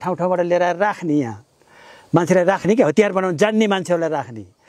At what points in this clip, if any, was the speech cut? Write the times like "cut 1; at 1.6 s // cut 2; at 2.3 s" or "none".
none